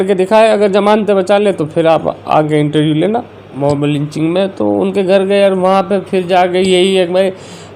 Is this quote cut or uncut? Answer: cut